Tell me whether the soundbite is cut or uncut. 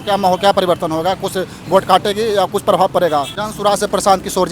cut